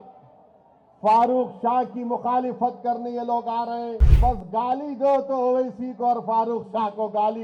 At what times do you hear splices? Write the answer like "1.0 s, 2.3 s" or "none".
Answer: 4.0 s

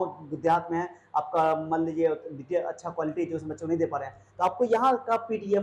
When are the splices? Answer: none

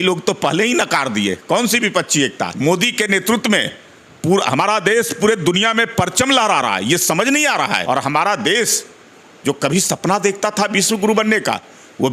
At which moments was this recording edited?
2.5 s, 7.8 s

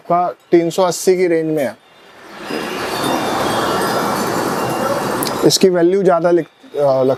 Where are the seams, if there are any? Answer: none

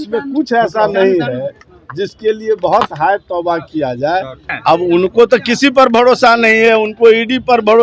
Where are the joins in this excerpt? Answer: 4.5 s

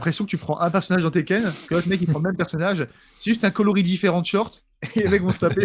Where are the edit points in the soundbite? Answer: none

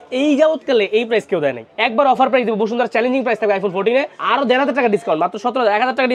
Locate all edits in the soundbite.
1.7 s, 4.2 s

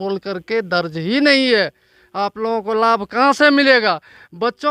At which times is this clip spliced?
none

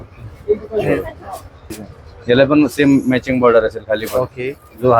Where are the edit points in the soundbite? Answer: 1.6 s

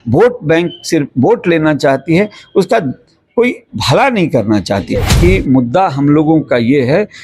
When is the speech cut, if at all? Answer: 5.1 s

